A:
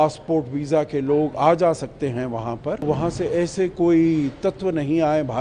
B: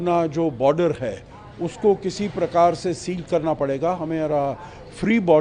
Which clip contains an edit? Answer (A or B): A